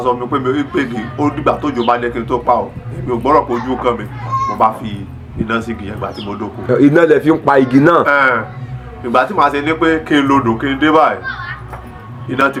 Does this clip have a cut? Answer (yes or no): no